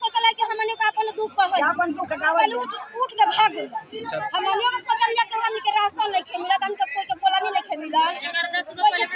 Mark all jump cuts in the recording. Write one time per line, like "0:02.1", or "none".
none